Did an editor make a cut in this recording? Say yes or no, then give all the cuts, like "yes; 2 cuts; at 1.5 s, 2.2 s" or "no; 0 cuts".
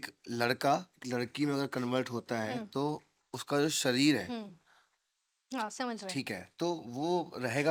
no; 0 cuts